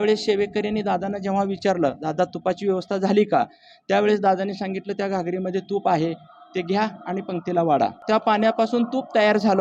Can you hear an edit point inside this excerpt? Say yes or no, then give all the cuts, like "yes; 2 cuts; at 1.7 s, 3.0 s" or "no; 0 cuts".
yes; 1 cut; at 8.0 s